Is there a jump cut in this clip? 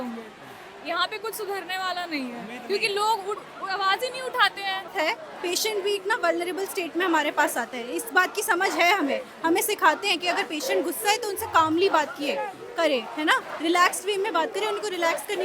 yes; 1 cut; at 4.9 s

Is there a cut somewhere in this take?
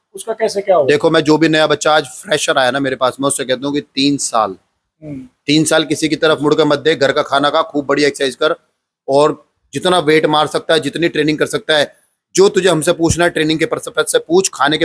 no; 0 cuts

